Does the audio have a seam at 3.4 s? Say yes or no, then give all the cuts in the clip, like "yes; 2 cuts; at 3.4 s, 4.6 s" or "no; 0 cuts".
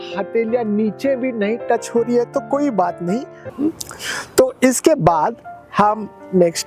yes; 1 cut; at 3.4 s